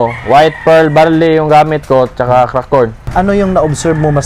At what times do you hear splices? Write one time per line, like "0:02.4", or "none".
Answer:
0:03.0